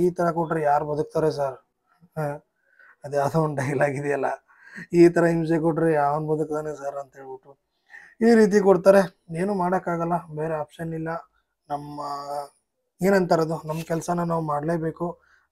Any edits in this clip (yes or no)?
no